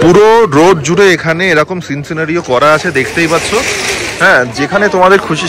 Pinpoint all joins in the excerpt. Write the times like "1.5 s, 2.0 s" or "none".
none